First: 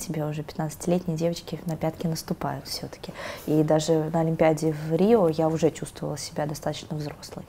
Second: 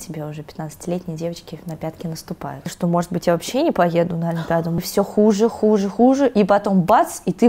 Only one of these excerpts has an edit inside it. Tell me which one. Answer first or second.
second